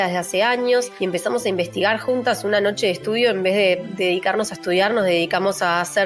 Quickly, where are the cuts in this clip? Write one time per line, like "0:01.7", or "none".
0:00.9
0:03.9